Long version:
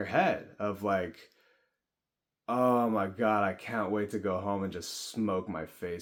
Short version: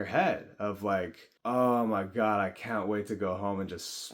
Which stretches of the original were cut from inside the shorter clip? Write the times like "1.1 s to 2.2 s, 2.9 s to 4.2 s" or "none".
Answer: 1.2 s to 2.3 s